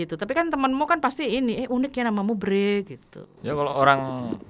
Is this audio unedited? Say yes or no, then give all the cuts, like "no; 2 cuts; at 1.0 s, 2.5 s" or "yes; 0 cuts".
yes; 0 cuts